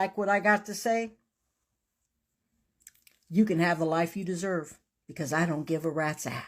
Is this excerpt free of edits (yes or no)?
yes